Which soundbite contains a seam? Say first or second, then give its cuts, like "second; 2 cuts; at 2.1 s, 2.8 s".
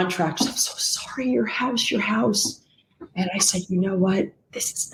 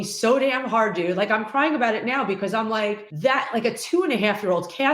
second; 1 cut; at 3.1 s